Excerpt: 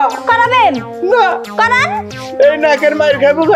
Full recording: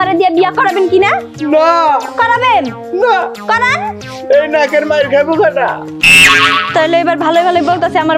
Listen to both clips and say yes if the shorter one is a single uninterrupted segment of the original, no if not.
yes